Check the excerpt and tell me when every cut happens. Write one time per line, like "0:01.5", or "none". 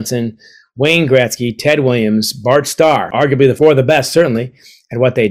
0:03.4